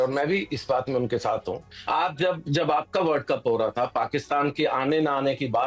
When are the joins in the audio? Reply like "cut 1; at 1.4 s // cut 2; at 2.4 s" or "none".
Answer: cut 1; at 1.8 s